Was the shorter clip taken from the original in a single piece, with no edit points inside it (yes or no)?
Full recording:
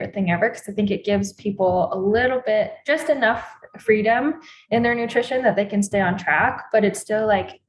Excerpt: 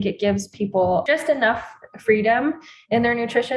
no